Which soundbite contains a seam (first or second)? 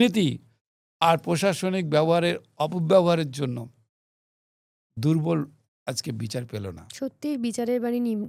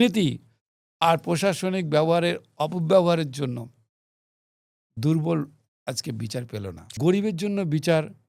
second